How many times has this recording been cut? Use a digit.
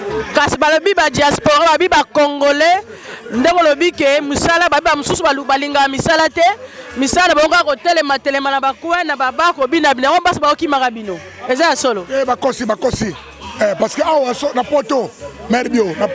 0